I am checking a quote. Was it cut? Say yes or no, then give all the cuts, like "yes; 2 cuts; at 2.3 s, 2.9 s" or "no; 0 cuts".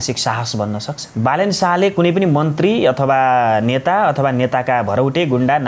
yes; 1 cut; at 1.0 s